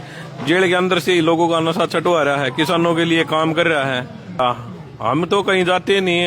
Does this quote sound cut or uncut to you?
cut